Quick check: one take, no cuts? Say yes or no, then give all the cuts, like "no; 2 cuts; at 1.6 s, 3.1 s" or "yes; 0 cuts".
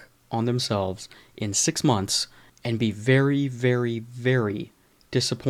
yes; 0 cuts